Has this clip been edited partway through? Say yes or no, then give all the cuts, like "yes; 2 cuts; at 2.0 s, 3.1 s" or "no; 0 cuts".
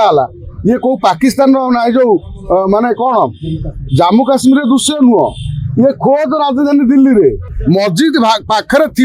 yes; 1 cut; at 7.5 s